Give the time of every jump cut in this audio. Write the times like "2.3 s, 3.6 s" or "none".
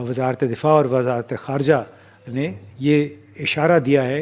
2.3 s